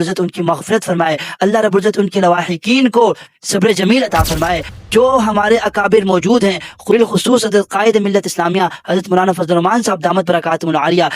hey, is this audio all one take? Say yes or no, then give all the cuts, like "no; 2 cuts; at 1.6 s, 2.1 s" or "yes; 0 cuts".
no; 1 cut; at 4.7 s